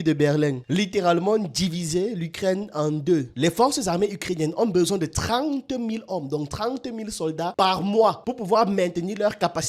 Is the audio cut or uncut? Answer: cut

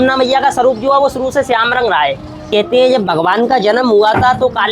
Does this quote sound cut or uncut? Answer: cut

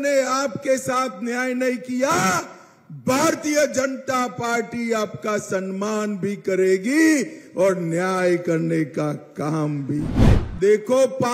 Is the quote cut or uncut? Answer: cut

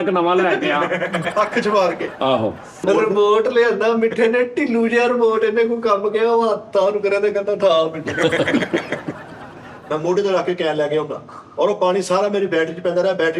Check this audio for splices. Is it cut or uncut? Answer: cut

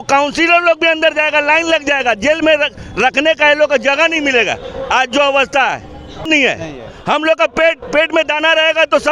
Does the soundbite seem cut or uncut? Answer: cut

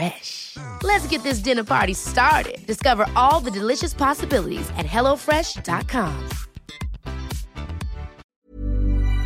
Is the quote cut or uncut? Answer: cut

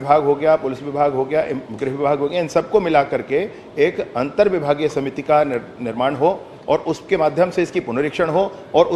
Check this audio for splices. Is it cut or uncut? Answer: uncut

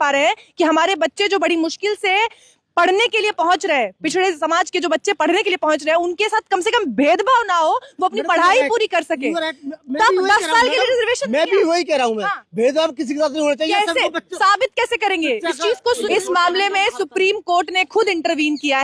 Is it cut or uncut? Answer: cut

